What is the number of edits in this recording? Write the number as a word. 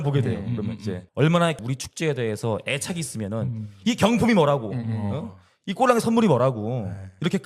two